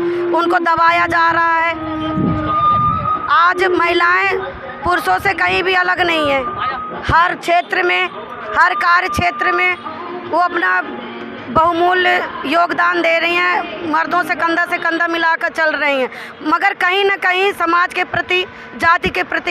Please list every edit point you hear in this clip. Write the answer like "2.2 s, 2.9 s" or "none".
none